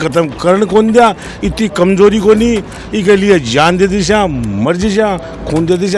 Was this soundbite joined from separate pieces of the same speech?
no; 0 cuts

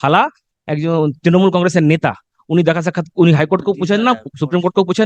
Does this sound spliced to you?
no; 0 cuts

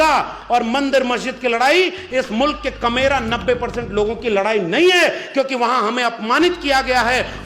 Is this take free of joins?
yes; 0 cuts

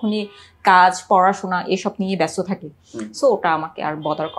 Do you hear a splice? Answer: no; 0 cuts

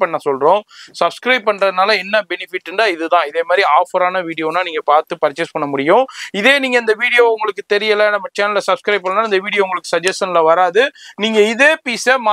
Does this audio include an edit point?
no; 0 cuts

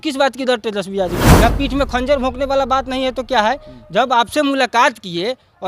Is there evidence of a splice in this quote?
yes; 1 cut; at 1.2 s

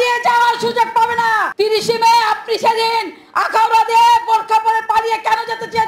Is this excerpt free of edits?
no; 1 cut; at 1.5 s

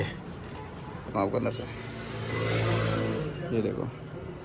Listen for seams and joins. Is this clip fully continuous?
no; 1 cut; at 1.1 s

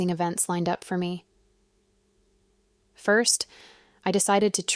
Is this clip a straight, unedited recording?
no; 1 cut; at 1.7 s

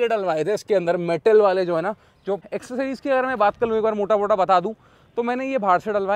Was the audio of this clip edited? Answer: yes; 1 cut; at 2.4 s

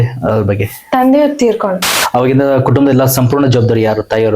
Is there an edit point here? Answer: yes; 1 cut; at 1.9 s

